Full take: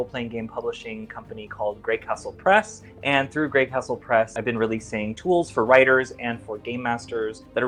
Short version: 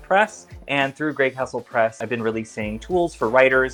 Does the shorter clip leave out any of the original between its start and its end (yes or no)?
no